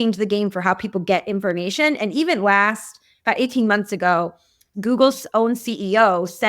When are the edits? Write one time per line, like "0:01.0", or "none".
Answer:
0:04.7